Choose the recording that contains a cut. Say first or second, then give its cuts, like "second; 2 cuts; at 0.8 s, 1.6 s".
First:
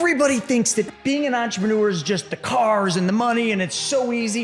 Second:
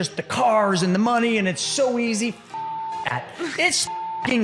first; 1 cut; at 0.9 s